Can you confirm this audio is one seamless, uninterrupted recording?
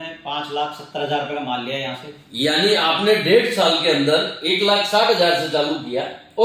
yes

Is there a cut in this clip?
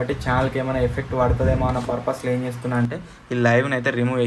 no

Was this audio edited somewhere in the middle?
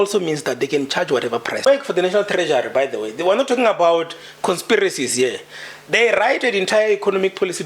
yes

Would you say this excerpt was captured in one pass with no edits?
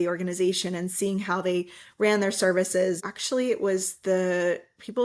no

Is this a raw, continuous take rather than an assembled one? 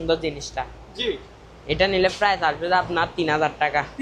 yes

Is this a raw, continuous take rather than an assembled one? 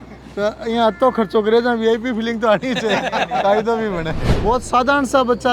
no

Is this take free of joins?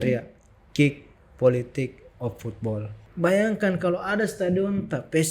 no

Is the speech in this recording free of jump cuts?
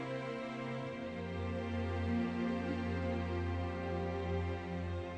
yes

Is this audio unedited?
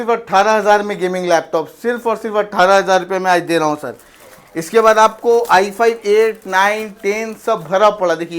yes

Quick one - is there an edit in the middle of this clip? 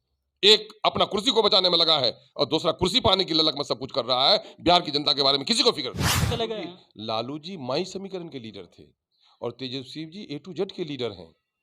yes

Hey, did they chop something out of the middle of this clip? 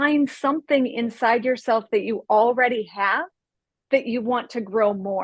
no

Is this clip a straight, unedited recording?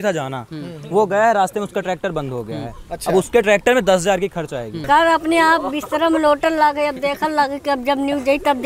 no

